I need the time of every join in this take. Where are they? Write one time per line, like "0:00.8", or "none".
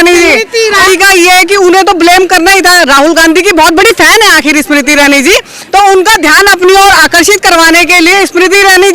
0:00.8
0:05.6